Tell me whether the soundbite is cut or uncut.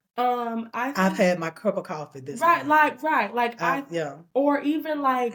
uncut